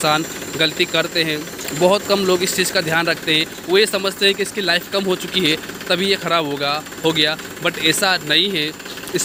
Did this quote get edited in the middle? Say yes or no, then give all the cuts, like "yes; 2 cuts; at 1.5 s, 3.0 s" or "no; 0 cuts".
no; 0 cuts